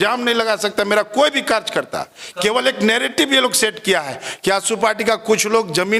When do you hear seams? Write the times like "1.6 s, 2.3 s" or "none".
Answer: none